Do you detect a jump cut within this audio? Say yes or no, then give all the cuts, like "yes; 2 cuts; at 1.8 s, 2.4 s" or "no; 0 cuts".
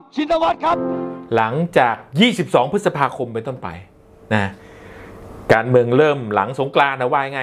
yes; 1 cut; at 1.1 s